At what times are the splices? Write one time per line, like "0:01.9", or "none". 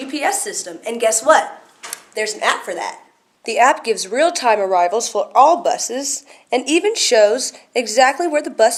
none